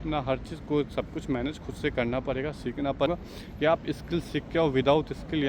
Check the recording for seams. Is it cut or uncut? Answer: cut